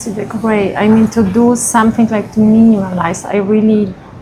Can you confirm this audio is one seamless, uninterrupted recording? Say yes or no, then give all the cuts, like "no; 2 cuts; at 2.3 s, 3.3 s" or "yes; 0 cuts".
yes; 0 cuts